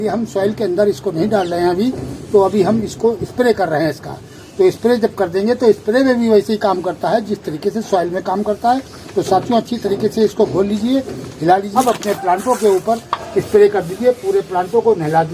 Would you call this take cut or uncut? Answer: cut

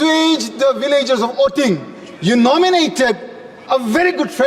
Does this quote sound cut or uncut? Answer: uncut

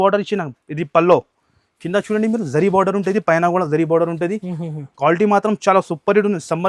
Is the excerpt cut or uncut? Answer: uncut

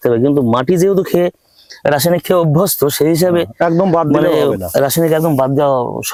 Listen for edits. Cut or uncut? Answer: uncut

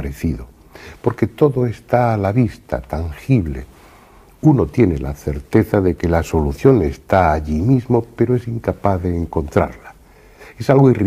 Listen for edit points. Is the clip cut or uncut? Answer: cut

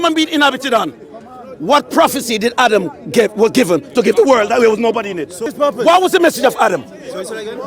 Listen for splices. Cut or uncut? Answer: cut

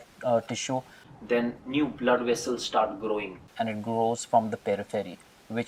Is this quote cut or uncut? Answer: uncut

